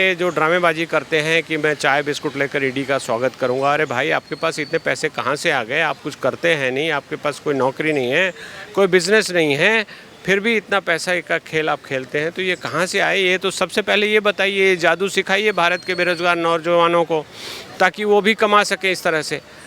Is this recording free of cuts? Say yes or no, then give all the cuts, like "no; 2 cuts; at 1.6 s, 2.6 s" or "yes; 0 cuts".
yes; 0 cuts